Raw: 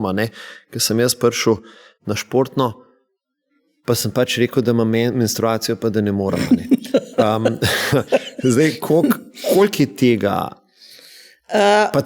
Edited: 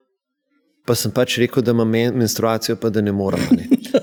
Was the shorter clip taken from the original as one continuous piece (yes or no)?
yes